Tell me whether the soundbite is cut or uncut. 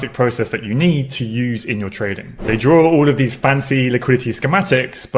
uncut